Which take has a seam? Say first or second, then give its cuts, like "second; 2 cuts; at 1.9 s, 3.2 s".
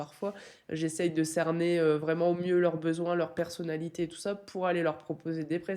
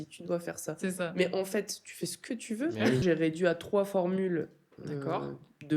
second; 1 cut; at 3.0 s